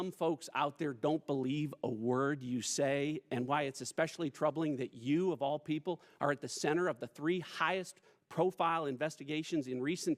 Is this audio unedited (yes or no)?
yes